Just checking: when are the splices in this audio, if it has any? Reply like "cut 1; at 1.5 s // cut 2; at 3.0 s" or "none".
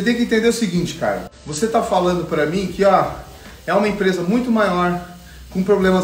cut 1; at 1.2 s